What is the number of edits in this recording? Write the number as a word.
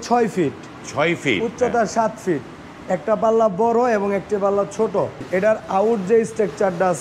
one